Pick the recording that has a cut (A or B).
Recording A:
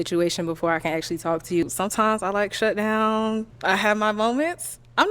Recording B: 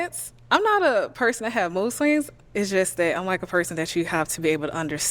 A